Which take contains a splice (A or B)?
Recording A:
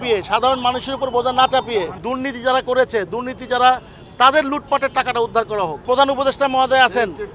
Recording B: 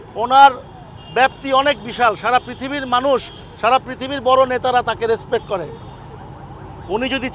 A